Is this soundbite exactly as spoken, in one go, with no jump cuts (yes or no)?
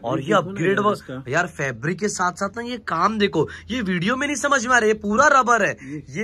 yes